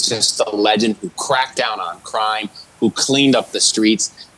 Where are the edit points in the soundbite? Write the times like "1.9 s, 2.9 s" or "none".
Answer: none